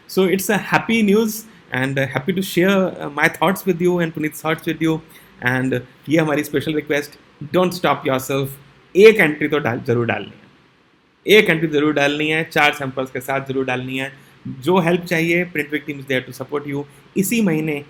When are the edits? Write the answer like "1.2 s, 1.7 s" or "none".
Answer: none